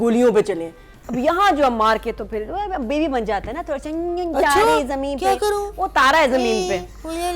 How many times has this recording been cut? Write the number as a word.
one